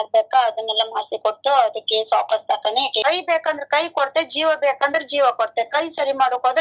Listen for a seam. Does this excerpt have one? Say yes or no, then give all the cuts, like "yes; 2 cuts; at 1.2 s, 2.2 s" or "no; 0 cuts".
yes; 1 cut; at 3.0 s